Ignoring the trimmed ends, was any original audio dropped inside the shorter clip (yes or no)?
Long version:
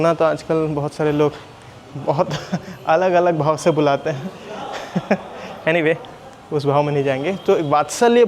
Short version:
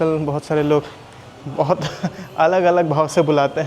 no